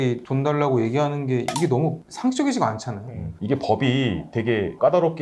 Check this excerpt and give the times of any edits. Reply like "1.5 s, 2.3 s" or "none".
3.3 s